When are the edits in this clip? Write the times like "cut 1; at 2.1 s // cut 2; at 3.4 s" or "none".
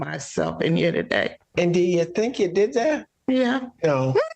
cut 1; at 1.4 s

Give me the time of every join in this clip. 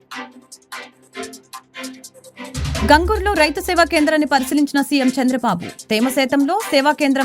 cut 1; at 2.8 s

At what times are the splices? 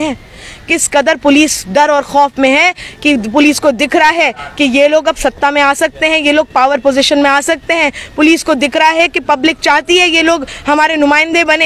none

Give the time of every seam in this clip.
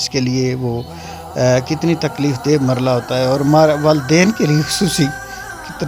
none

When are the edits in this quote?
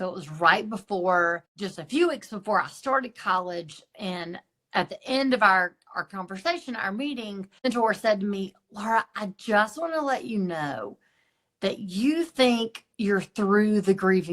cut 1; at 1.6 s // cut 2; at 7.7 s

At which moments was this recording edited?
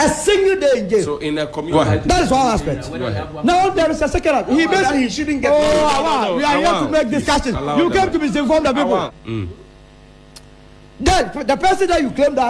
cut 1; at 1.7 s // cut 2; at 9.2 s

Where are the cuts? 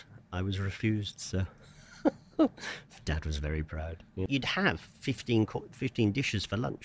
cut 1; at 4.2 s

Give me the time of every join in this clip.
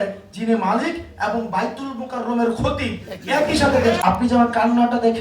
cut 1; at 4.0 s

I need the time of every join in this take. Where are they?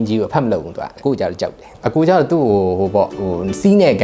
cut 1; at 0.9 s // cut 2; at 1.7 s

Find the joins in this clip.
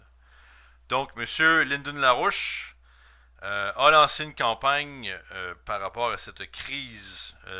cut 1; at 6.4 s

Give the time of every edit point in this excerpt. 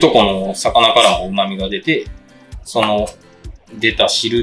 none

